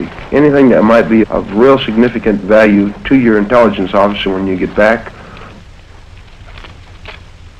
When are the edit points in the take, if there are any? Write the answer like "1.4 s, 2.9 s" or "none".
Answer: 0.9 s